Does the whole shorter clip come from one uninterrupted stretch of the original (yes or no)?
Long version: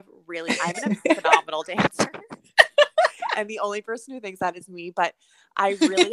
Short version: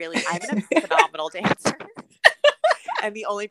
yes